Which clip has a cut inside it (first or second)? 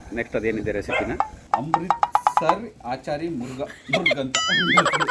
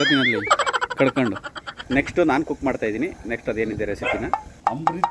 second